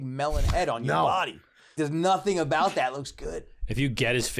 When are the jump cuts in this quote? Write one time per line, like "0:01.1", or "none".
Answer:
0:01.7